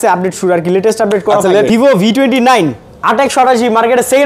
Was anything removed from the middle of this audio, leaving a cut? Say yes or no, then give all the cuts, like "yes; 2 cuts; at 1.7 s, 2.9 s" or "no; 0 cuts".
yes; 1 cut; at 1.7 s